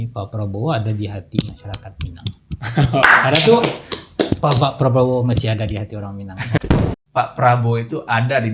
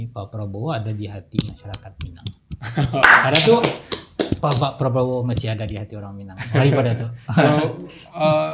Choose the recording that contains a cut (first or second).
first